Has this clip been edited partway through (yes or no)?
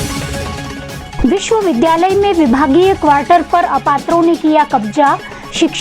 yes